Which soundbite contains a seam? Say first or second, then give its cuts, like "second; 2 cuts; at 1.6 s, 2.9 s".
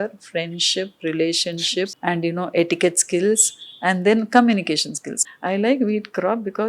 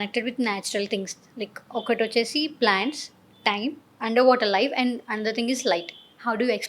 first; 2 cuts; at 1.9 s, 5.1 s